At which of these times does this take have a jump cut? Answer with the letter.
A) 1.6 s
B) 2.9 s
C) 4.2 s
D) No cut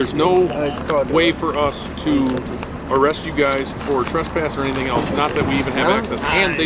D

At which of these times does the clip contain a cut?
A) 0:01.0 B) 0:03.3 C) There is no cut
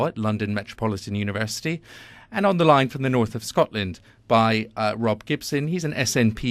B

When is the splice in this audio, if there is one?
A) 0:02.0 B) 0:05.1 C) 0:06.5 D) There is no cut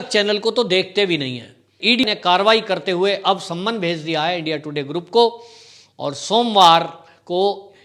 A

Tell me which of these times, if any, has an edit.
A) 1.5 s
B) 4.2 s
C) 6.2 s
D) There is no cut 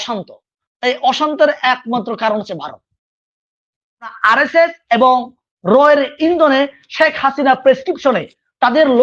B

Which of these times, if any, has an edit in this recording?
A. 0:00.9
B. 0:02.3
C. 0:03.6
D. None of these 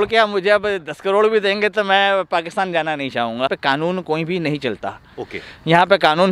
C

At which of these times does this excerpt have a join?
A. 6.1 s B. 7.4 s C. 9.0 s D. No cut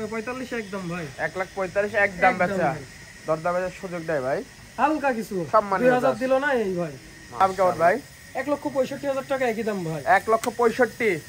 B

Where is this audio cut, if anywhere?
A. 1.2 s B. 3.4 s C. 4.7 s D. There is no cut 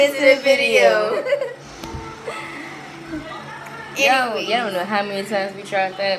A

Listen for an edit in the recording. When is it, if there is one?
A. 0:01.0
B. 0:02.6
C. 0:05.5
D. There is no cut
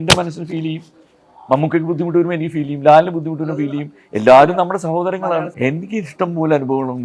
C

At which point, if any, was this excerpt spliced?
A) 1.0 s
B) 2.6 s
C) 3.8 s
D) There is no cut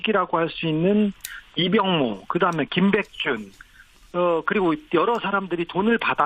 B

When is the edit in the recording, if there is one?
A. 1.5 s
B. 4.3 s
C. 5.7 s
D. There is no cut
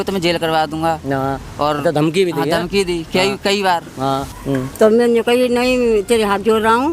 B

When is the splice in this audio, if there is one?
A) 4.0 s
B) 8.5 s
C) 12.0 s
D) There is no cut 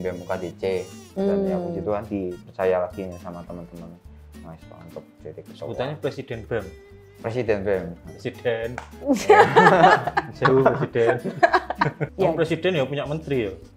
C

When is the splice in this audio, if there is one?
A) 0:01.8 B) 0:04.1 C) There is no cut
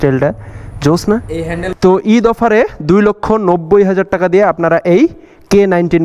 A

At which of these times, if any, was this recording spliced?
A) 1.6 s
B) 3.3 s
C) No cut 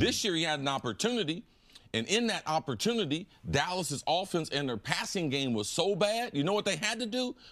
B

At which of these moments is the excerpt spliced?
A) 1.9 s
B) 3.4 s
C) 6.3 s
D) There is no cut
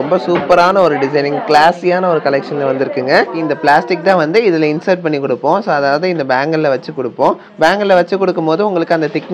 B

